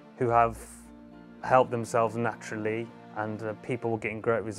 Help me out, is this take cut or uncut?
cut